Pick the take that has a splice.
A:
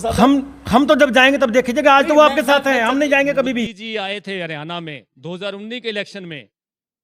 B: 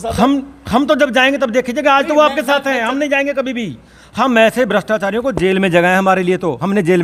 A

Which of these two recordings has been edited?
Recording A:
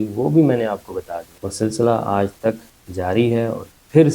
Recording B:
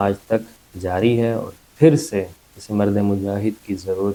A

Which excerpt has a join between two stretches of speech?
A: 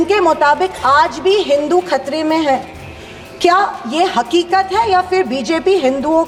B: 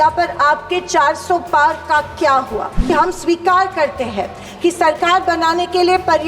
B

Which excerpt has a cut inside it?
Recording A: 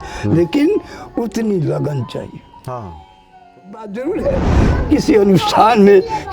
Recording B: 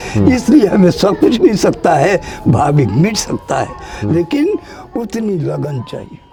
A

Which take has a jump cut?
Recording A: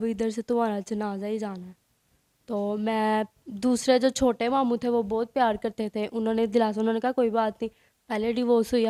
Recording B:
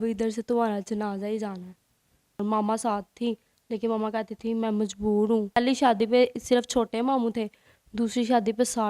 B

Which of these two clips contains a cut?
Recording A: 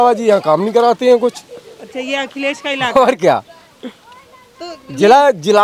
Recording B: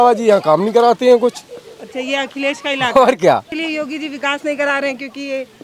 B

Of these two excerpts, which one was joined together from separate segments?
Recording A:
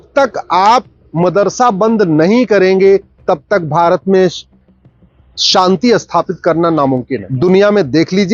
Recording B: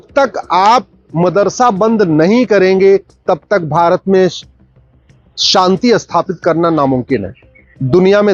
A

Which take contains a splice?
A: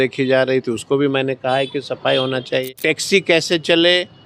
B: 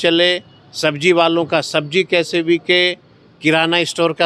A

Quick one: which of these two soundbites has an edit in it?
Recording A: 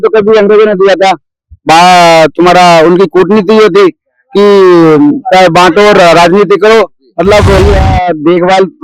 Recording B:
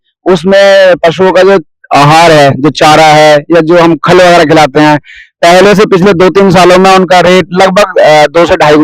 A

